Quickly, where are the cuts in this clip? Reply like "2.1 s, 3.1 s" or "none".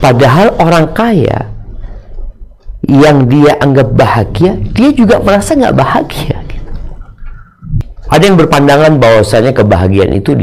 7.8 s